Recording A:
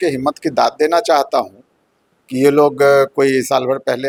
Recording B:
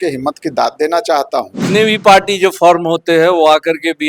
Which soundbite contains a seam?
B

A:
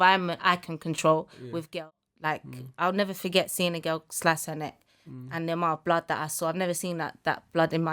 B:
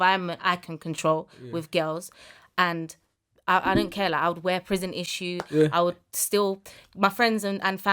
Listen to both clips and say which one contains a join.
A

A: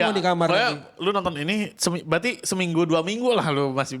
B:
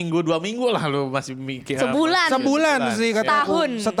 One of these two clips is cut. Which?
A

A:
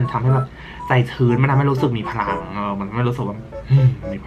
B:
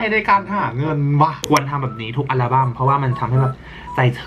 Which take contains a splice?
B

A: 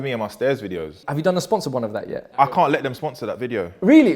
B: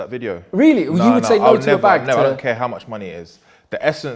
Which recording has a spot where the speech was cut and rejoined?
A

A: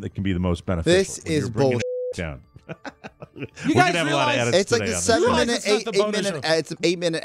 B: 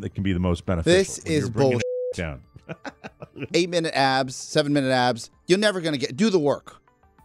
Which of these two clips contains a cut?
B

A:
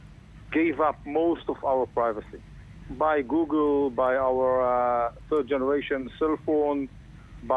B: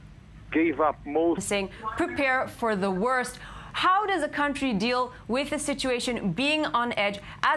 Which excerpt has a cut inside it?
A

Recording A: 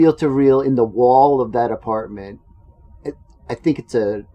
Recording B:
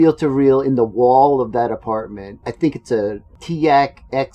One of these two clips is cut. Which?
B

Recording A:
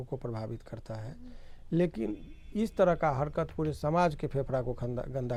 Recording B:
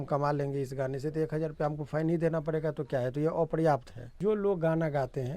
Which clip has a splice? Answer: B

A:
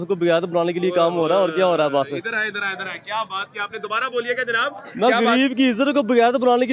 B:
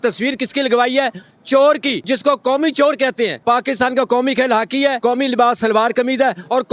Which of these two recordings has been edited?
B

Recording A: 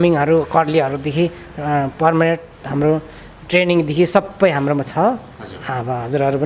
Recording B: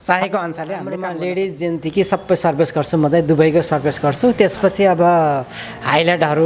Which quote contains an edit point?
B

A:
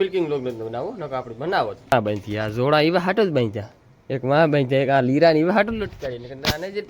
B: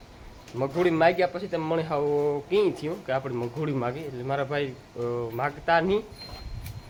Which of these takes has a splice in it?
A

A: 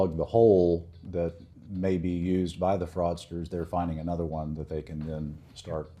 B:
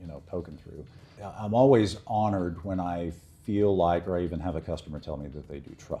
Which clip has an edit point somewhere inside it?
B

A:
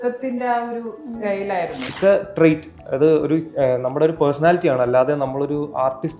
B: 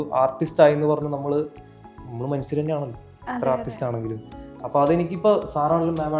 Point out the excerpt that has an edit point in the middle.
A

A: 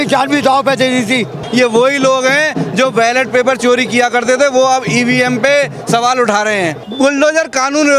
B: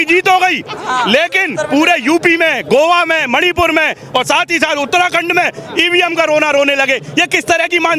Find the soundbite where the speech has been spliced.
A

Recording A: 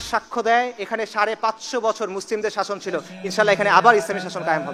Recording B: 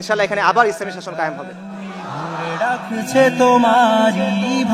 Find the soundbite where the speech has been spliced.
B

